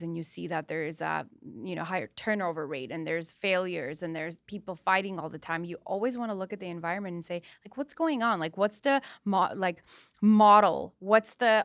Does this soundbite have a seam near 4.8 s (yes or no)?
no